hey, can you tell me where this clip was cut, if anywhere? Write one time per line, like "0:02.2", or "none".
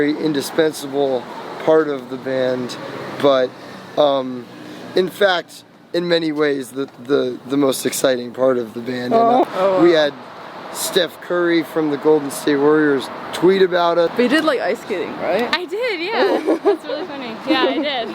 0:09.4
0:14.1